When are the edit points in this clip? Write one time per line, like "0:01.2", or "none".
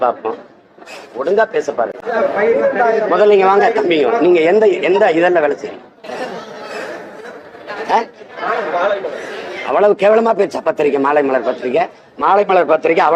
0:02.0